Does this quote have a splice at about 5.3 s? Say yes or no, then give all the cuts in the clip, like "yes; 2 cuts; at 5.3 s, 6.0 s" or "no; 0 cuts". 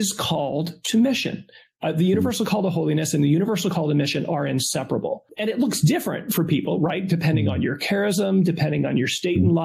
yes; 1 cut; at 5.3 s